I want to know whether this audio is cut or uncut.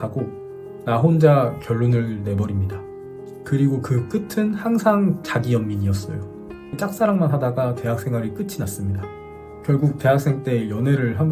cut